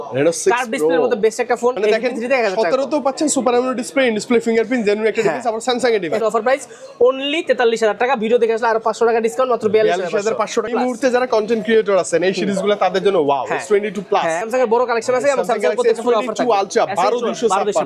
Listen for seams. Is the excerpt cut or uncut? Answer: cut